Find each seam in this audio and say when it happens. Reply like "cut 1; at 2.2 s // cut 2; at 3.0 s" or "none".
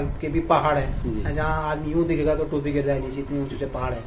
none